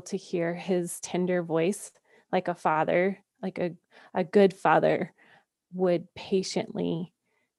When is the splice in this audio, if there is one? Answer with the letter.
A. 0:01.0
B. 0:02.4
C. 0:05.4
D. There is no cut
C